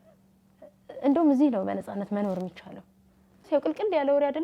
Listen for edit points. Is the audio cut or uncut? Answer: cut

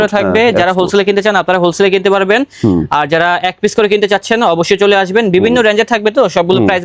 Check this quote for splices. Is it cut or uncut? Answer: uncut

